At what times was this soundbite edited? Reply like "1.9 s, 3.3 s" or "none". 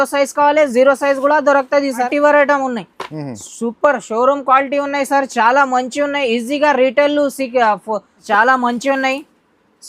2.1 s, 8.2 s